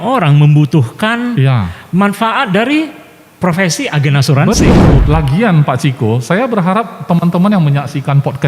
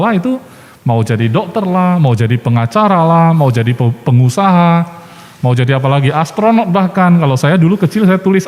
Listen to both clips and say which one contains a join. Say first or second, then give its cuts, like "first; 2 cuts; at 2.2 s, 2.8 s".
first; 1 cut; at 5.0 s